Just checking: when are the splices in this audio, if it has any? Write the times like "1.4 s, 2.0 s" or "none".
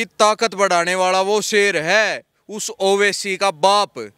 none